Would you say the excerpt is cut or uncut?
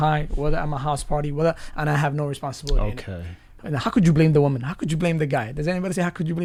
uncut